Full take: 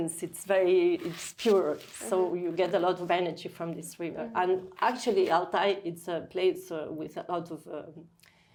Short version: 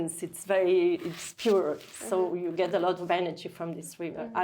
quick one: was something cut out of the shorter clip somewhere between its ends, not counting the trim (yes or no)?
no